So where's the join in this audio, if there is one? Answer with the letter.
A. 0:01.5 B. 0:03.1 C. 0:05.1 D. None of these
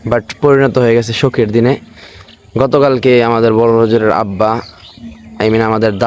D